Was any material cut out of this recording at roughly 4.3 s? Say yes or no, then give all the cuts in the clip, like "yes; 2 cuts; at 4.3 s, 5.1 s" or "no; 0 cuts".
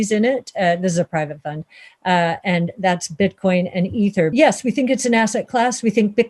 yes; 1 cut; at 4.3 s